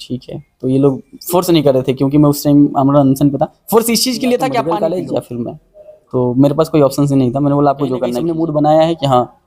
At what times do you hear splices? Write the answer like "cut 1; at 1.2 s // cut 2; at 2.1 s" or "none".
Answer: cut 1; at 4.6 s // cut 2; at 8.2 s